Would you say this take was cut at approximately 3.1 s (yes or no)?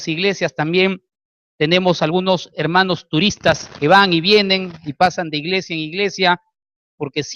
no